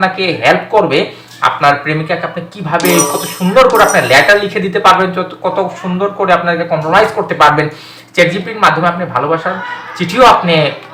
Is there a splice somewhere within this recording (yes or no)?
no